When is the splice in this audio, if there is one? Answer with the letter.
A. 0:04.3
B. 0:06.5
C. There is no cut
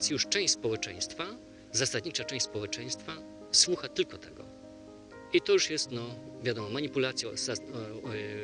C